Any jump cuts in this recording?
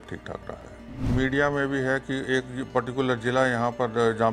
yes; 1 cut; at 1.0 s

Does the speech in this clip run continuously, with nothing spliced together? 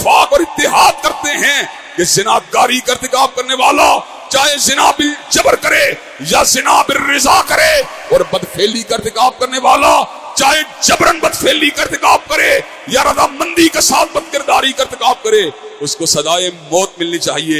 yes; 0 cuts

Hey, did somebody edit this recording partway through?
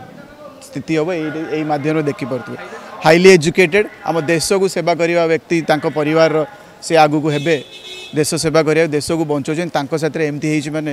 no; 0 cuts

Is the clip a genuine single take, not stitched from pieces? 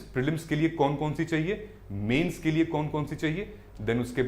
yes; 0 cuts

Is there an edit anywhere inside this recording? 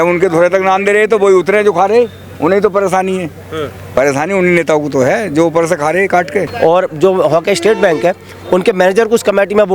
yes; 1 cut; at 6.5 s

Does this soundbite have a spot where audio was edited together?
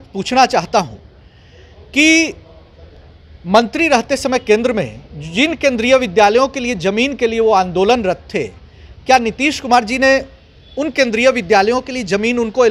no; 0 cuts

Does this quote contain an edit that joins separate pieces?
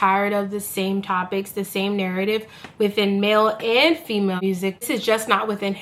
yes; 1 cut; at 4.9 s

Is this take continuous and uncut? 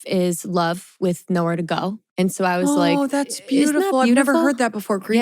no; 1 cut; at 2.0 s

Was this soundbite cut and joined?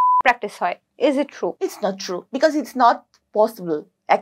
yes; 1 cut; at 2.1 s

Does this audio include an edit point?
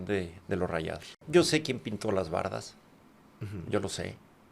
yes; 1 cut; at 1.1 s

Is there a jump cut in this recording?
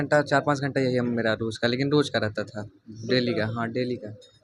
no; 0 cuts

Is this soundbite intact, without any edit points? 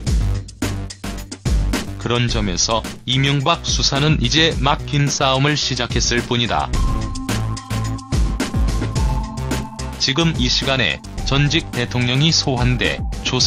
yes; 0 cuts

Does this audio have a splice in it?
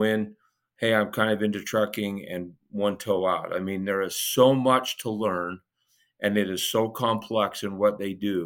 no; 0 cuts

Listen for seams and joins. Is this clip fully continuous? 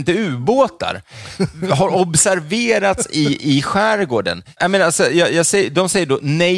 yes; 0 cuts

